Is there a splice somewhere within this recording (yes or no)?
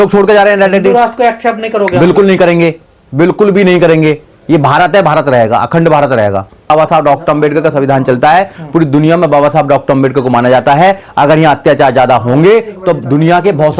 yes